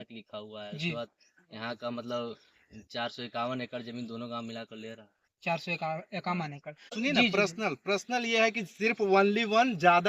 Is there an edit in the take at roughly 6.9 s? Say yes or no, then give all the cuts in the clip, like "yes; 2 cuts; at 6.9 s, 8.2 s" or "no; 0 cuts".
yes; 1 cut; at 6.9 s